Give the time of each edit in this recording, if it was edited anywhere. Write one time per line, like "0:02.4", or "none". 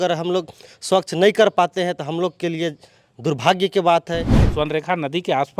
0:04.4